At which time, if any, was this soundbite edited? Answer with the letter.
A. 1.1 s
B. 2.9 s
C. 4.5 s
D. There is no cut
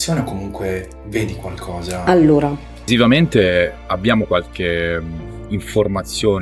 B